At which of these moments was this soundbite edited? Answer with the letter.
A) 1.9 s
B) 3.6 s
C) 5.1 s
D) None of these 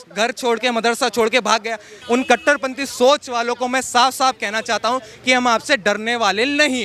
A